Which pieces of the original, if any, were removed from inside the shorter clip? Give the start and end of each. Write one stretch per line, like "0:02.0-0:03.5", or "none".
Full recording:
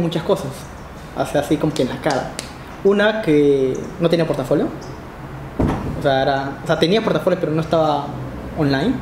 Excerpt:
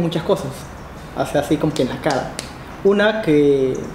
none